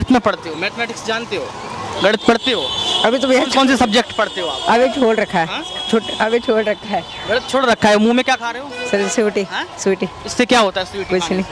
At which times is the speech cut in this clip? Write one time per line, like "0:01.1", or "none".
none